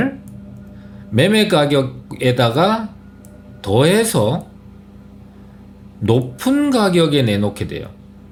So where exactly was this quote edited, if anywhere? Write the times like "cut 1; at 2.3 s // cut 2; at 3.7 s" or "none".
none